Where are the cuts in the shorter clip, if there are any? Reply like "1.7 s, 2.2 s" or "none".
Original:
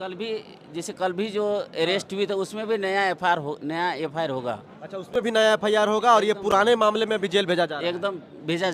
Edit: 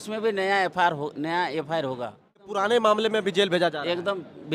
2.7 s